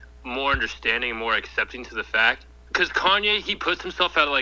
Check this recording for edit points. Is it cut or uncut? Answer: cut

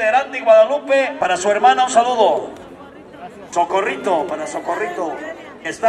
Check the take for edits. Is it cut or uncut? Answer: cut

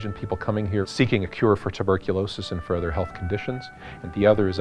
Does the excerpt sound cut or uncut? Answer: uncut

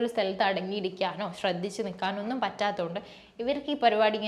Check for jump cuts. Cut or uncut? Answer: uncut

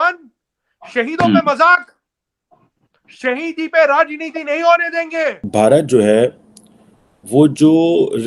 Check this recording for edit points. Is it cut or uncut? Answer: cut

